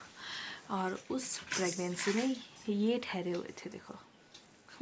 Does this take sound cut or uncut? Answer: uncut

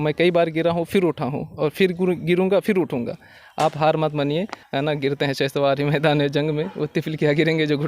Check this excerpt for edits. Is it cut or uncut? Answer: cut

